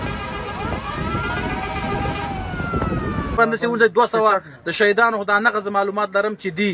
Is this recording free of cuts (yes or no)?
no